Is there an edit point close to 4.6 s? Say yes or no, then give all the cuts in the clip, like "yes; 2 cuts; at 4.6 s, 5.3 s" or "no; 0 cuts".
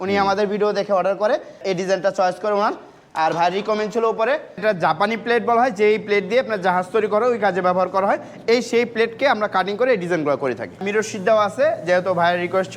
yes; 3 cuts; at 1.6 s, 4.6 s, 10.8 s